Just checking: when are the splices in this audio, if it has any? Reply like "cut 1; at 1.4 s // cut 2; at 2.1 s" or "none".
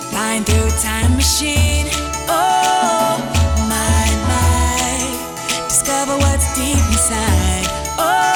none